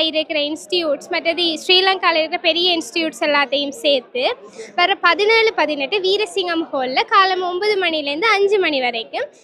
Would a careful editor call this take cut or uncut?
uncut